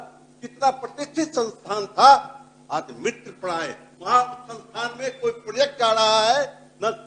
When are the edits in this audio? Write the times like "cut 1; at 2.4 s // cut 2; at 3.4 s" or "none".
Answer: cut 1; at 3.9 s